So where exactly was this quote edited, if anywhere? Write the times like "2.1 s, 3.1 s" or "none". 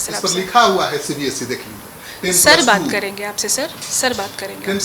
none